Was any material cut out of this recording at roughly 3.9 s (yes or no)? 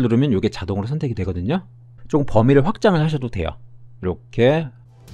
no